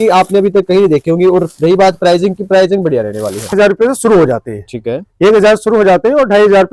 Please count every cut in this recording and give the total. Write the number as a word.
one